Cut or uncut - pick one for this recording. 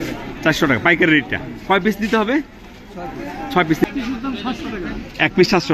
cut